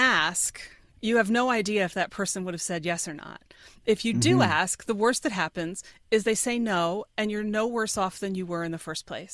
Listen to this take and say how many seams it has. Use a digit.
0